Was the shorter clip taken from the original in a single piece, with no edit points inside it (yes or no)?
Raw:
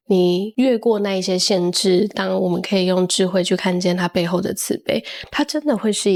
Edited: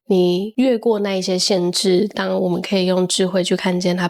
yes